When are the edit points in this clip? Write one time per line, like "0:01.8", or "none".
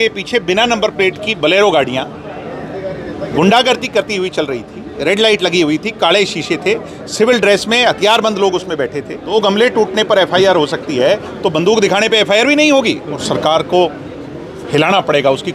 0:04.8
0:09.3
0:13.2